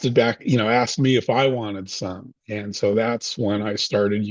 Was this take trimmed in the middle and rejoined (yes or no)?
no